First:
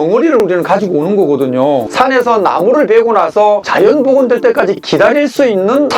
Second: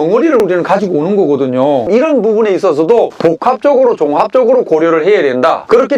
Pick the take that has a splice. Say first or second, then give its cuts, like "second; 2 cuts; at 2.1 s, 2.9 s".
first; 1 cut; at 1.8 s